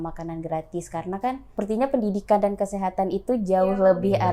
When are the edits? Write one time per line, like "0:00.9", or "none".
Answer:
0:01.4

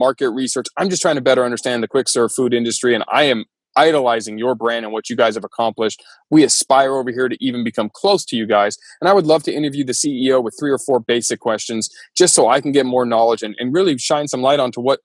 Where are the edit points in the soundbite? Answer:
none

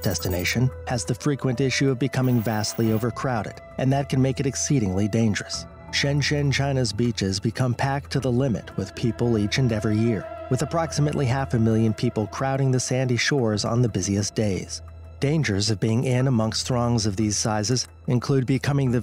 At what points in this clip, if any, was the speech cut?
0:06.5

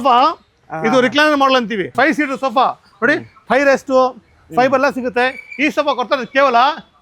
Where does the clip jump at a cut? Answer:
0:01.9

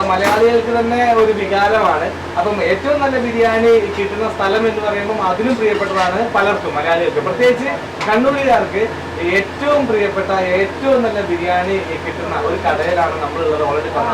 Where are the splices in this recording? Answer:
none

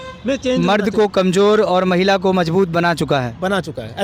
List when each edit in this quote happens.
none

